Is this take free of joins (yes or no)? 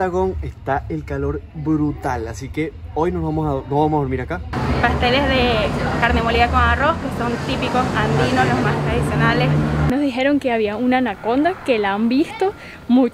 no